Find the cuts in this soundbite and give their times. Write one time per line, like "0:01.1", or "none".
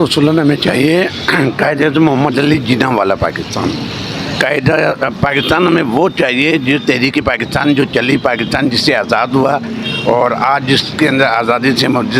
none